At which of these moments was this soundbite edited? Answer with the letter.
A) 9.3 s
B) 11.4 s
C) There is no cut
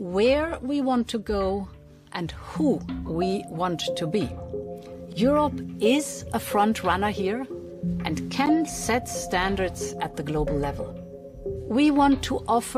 C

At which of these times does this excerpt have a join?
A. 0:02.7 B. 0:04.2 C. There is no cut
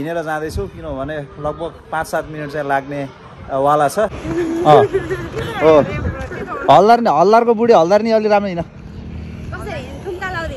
B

